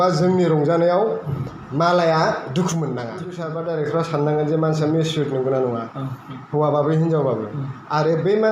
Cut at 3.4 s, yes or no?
yes